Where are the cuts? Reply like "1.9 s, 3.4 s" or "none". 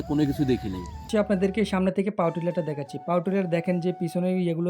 1.1 s